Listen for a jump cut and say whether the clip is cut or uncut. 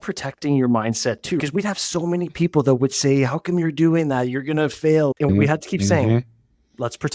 cut